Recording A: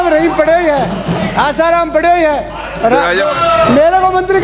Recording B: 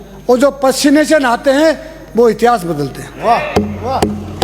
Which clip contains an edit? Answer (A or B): A